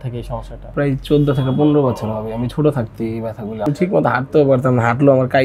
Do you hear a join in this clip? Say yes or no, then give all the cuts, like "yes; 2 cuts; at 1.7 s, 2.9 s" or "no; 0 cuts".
yes; 1 cut; at 3.6 s